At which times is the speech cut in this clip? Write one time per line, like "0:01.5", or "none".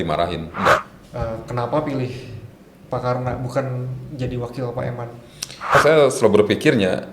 0:01.0
0:05.7